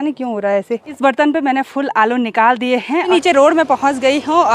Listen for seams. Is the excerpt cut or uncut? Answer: cut